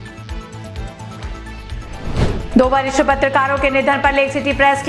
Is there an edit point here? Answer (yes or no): yes